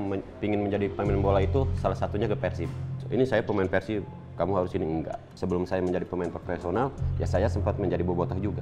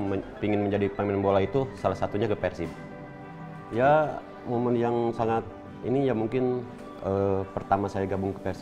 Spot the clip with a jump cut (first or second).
first